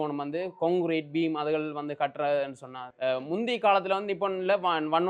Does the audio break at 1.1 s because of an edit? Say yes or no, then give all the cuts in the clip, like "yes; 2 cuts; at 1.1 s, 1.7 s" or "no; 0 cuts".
no; 1 cut; at 2.9 s